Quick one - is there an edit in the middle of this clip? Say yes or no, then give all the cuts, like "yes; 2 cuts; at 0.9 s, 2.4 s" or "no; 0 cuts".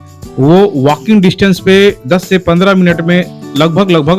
no; 0 cuts